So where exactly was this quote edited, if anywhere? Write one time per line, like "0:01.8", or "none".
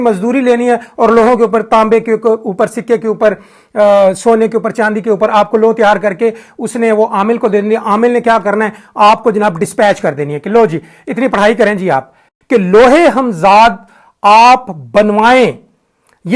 0:12.3